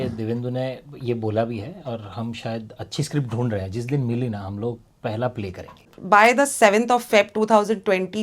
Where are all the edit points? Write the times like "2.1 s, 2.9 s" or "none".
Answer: 5.8 s